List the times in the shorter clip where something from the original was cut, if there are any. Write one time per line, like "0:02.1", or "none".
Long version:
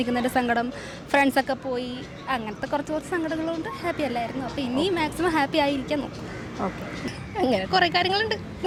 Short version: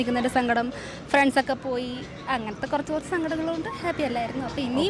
none